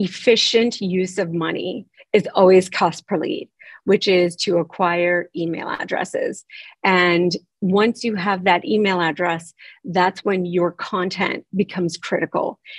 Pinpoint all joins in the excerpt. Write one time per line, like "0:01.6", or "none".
none